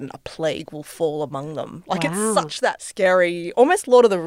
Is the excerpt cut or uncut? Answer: cut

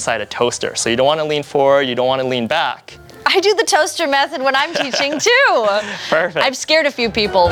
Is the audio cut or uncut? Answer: uncut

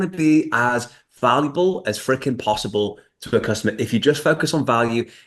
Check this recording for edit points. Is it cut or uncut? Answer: uncut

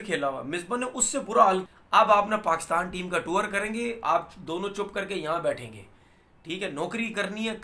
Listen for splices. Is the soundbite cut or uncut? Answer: cut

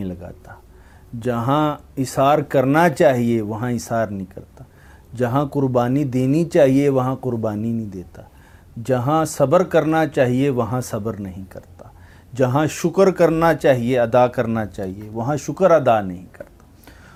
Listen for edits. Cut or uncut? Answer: uncut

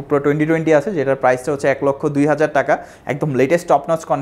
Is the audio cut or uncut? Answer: uncut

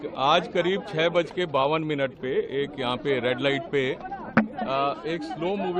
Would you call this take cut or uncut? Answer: uncut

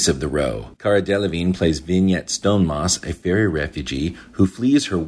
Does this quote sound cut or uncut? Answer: uncut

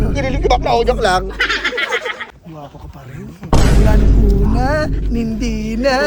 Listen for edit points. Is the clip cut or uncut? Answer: cut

